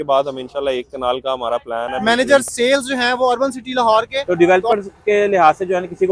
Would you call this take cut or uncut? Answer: cut